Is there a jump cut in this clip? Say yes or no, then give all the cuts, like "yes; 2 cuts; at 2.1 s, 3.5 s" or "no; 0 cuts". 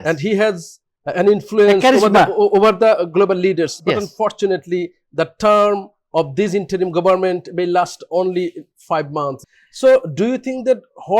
yes; 1 cut; at 9.4 s